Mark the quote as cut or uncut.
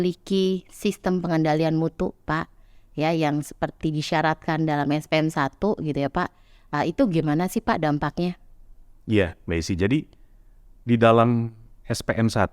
uncut